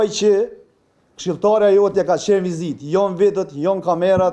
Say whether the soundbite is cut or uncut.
uncut